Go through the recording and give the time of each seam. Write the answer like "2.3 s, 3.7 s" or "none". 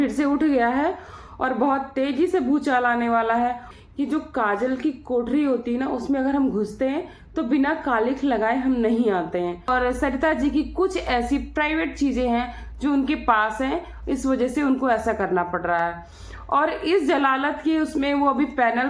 3.7 s, 9.7 s